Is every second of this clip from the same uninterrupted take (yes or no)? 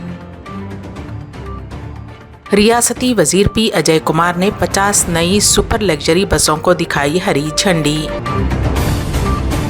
yes